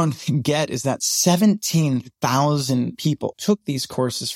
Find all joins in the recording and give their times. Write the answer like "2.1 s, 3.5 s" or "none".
3.3 s